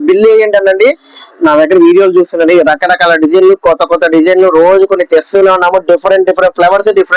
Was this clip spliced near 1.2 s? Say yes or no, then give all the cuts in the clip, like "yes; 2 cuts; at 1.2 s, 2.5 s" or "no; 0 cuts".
yes; 1 cut; at 1.2 s